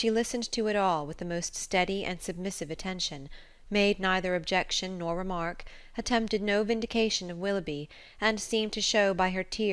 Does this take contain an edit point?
no; 0 cuts

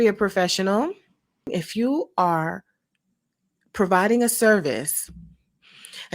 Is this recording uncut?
no; 1 cut; at 1.5 s

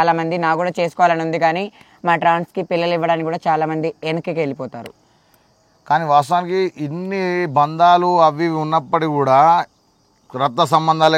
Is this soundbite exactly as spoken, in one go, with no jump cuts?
yes; 0 cuts

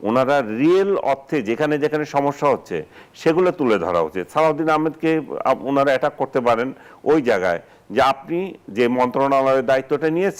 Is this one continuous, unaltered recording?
yes; 0 cuts

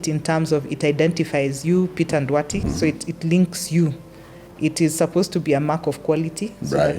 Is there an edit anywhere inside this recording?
yes; 1 cut; at 2.6 s

